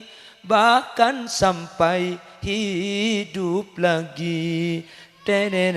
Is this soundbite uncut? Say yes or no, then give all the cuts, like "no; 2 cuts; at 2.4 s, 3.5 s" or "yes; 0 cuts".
yes; 0 cuts